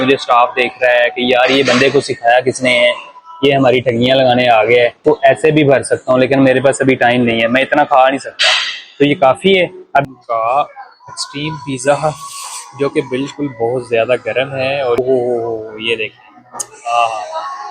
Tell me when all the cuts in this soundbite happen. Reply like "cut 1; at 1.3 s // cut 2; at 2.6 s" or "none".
cut 1; at 5.0 s // cut 2; at 10.0 s // cut 3; at 15.0 s